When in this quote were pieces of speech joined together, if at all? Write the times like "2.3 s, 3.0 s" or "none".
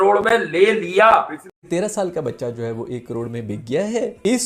1.5 s

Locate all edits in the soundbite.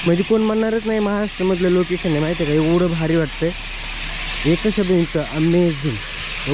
none

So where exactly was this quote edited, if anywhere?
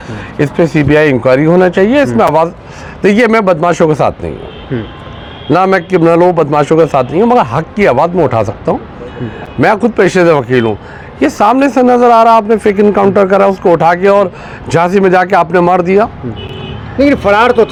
none

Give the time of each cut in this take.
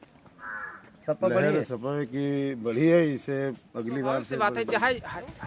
4.5 s

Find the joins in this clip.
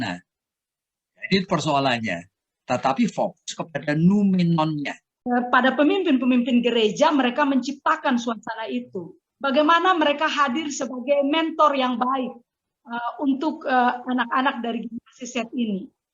5.1 s

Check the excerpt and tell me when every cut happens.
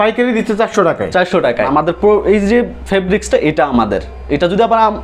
1.7 s

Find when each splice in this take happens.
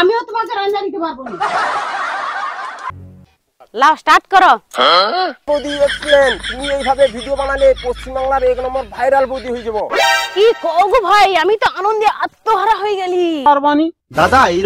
2.9 s, 13.5 s

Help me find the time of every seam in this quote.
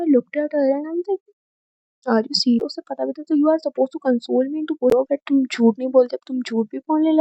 2.6 s, 4.9 s

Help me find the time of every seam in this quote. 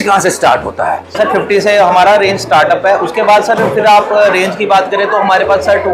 1.1 s

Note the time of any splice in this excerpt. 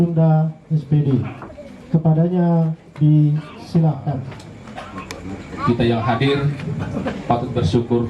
4.2 s

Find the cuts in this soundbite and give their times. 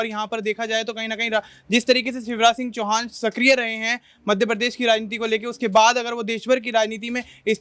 none

